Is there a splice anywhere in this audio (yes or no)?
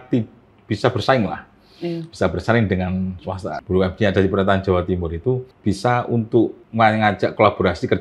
yes